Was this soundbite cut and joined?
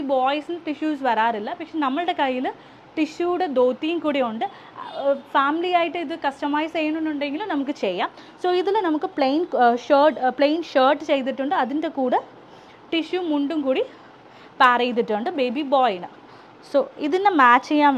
no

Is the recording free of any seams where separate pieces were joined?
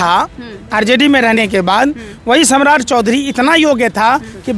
yes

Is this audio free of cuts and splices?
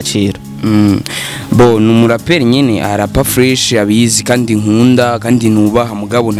yes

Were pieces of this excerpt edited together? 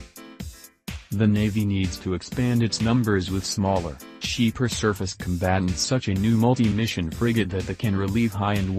yes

